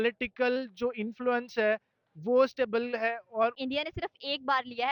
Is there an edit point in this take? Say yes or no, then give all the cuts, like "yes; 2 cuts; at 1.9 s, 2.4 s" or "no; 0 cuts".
yes; 1 cut; at 3.6 s